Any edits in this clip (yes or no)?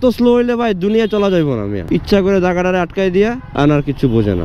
yes